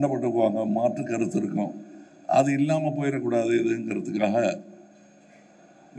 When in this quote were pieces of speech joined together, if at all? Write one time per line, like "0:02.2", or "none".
none